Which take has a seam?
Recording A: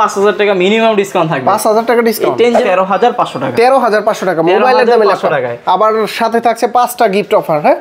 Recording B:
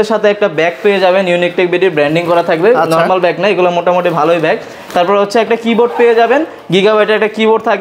A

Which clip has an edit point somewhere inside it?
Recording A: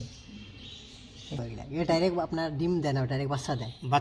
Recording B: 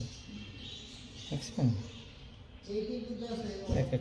A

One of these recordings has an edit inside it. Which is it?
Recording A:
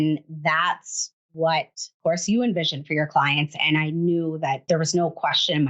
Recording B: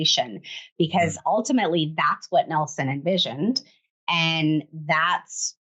A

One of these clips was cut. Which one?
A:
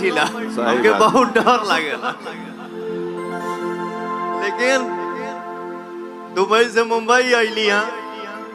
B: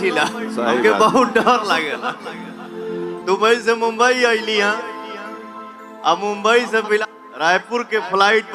B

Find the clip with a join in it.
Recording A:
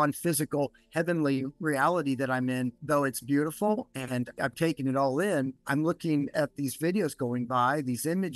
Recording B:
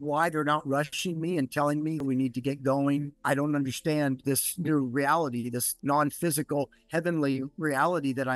B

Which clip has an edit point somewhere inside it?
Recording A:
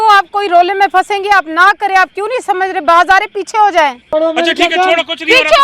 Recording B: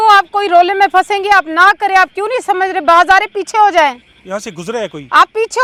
A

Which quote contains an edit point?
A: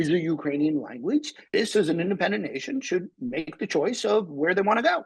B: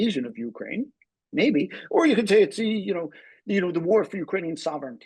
A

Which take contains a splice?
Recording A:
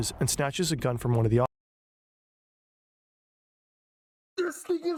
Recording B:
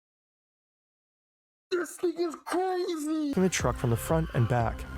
B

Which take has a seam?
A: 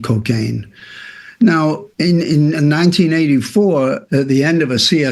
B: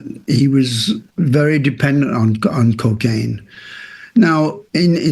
B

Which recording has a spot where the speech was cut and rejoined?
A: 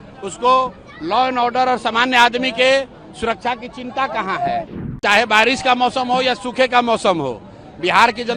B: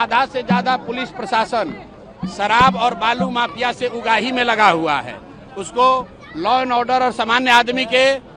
A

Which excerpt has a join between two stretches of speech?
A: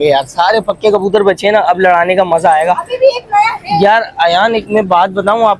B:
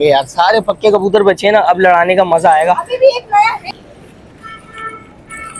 B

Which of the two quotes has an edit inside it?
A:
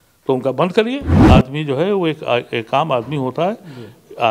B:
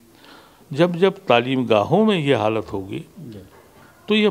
A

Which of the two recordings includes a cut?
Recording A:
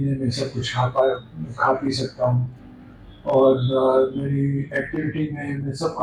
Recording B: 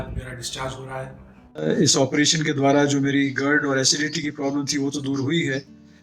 B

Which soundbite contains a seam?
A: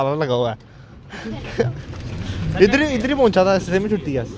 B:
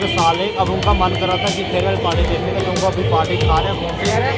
A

